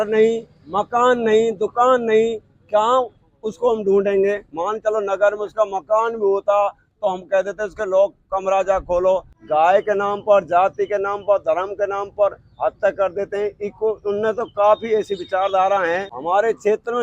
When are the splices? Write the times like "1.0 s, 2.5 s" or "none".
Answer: 9.3 s, 16.1 s